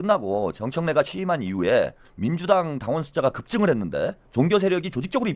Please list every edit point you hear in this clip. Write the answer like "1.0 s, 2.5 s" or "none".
2.0 s, 4.2 s